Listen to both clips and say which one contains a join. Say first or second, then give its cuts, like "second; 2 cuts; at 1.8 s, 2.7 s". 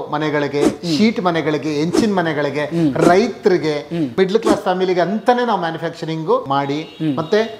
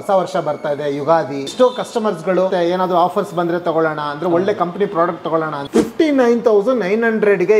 second; 3 cuts; at 1.5 s, 2.5 s, 5.6 s